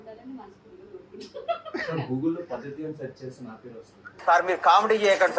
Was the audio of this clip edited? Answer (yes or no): no